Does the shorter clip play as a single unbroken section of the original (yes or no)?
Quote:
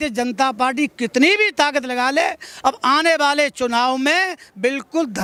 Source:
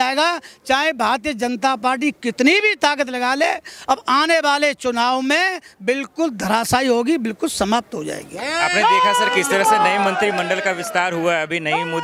yes